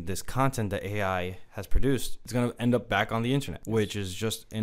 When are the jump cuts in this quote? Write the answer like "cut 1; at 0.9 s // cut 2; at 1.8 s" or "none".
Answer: cut 1; at 2.2 s // cut 2; at 3.6 s